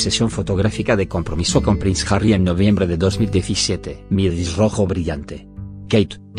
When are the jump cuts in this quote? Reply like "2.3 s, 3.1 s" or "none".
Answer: 1.5 s